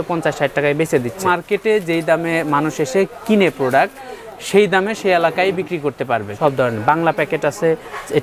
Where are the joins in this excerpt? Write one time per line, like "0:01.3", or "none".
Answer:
0:01.2
0:06.3